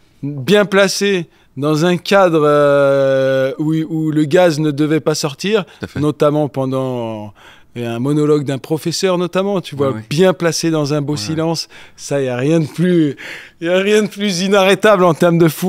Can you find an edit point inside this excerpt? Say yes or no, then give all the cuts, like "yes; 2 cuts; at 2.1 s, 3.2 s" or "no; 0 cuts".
no; 0 cuts